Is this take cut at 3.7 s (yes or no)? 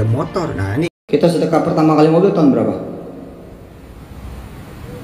no